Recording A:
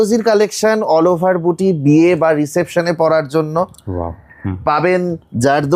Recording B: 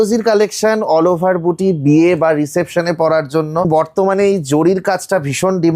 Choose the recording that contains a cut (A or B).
B